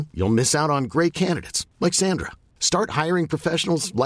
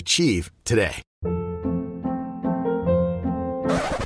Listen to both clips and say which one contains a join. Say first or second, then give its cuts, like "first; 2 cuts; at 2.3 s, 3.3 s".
second; 1 cut; at 1.1 s